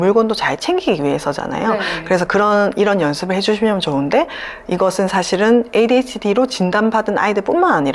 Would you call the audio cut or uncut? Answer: uncut